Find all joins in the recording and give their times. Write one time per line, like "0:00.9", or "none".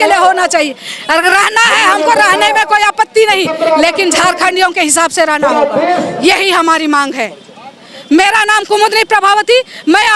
none